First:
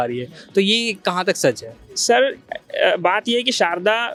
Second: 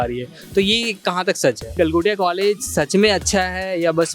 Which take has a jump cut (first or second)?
second